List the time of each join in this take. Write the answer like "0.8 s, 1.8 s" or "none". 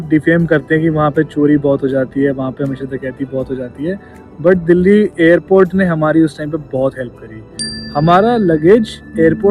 none